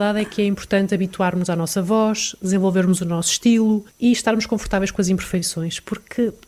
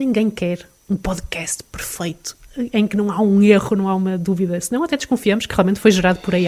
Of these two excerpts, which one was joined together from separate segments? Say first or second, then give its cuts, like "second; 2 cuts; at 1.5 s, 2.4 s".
first; 1 cut; at 3.9 s